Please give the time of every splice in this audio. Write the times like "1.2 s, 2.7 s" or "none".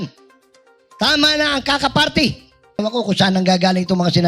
2.8 s